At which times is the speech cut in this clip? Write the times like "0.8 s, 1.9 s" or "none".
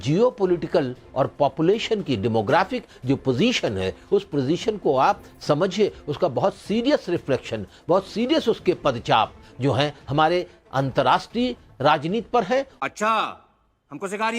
none